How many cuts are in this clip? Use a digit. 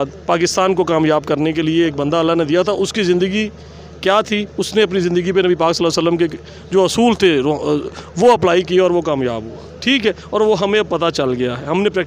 0